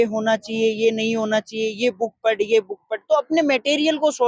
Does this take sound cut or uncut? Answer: uncut